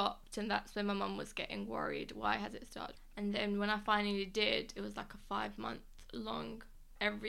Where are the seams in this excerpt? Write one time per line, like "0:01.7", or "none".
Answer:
0:03.2